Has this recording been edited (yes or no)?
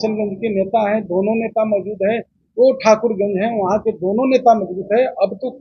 no